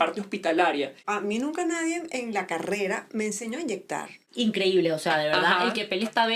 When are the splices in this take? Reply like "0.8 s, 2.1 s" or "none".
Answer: 1.0 s, 4.2 s

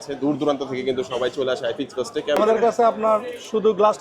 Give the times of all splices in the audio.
2.4 s

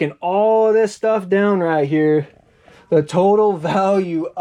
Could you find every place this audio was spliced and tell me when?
none

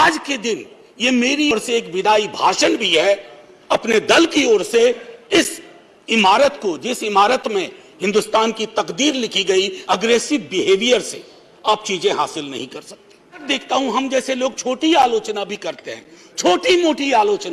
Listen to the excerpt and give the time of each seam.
1.5 s, 9.8 s, 13.4 s

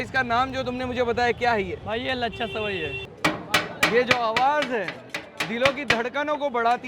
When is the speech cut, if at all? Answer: 3.0 s

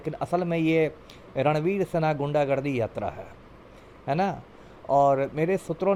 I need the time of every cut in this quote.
none

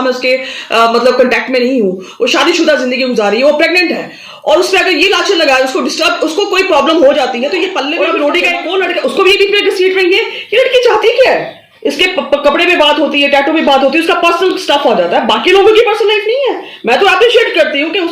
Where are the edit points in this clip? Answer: 7.9 s

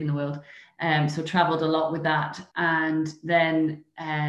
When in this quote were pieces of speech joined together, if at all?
2.4 s

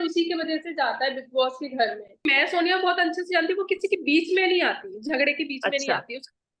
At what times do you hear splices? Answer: 2.2 s

